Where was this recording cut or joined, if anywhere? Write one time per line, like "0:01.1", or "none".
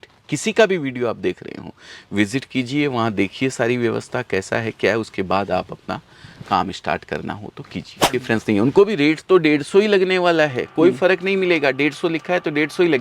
0:08.2